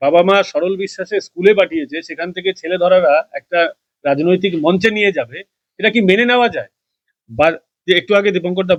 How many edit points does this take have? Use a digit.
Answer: 0